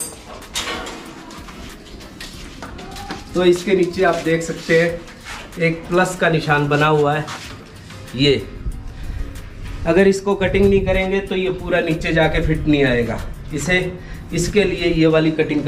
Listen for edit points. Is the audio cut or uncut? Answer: uncut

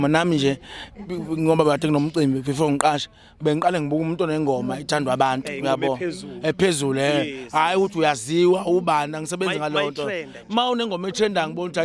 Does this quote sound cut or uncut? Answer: uncut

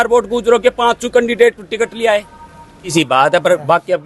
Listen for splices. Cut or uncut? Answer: cut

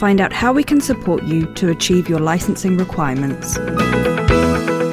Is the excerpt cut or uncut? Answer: cut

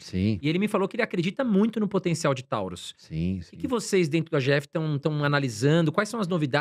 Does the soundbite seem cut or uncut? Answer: uncut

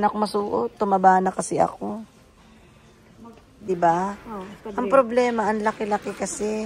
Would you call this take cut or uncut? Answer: cut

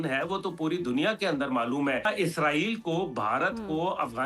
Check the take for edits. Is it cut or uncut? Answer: cut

